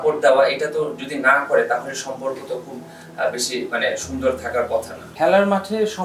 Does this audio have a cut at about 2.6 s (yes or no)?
no